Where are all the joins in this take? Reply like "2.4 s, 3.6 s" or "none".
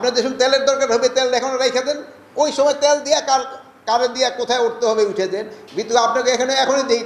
none